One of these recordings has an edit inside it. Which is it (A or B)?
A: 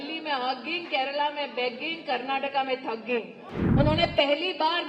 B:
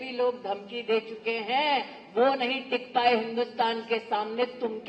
A